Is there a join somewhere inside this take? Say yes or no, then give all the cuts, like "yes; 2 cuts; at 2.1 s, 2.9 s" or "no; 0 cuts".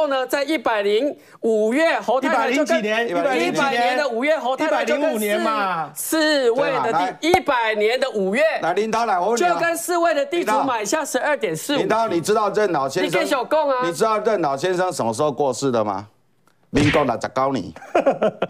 no; 0 cuts